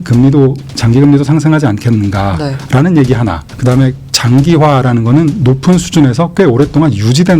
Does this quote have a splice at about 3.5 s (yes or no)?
yes